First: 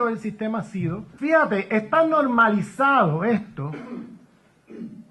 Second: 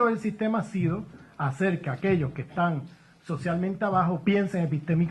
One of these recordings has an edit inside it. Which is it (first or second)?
second